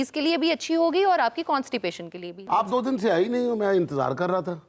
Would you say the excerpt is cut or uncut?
cut